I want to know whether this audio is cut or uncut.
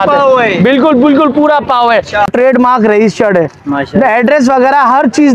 cut